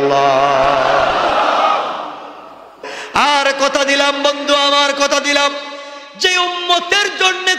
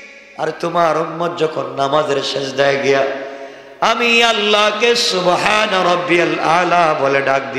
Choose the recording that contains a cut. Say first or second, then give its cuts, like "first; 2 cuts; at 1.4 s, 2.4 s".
first; 1 cut; at 2.9 s